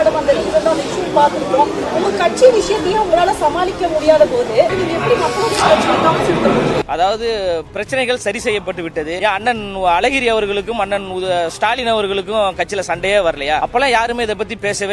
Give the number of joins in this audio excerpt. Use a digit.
4